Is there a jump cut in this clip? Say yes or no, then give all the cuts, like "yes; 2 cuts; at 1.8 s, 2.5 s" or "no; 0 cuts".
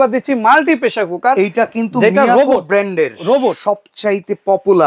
no; 0 cuts